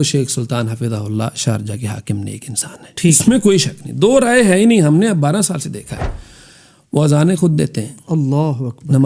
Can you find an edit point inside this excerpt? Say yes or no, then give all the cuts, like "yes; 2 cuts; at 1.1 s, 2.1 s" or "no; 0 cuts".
no; 0 cuts